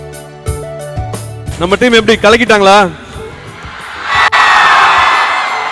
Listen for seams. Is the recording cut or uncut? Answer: cut